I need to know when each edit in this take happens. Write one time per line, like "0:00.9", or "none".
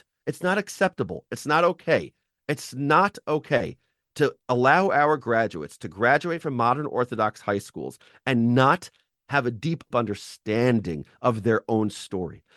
0:09.9